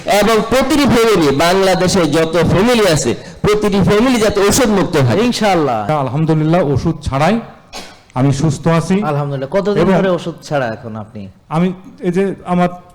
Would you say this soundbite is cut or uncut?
cut